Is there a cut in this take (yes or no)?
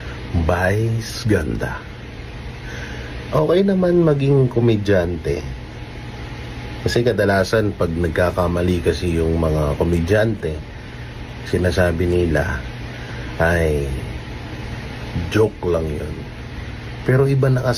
no